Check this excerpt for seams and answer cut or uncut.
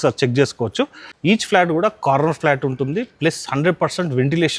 cut